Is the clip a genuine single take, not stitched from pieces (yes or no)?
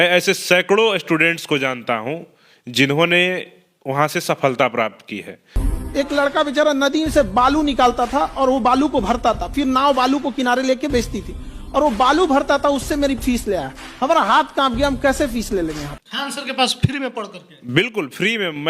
no